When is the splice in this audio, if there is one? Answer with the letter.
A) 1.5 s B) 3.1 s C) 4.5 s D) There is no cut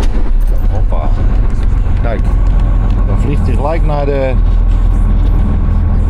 D